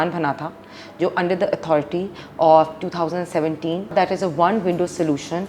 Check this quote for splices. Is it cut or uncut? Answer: cut